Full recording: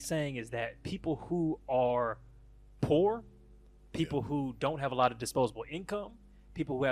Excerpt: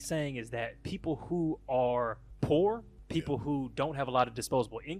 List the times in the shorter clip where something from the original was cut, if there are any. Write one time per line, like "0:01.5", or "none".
0:02.3
0:02.9